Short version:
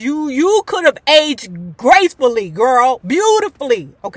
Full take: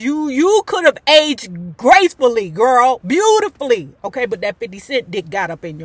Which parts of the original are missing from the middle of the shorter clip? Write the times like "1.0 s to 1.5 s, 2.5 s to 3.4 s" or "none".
none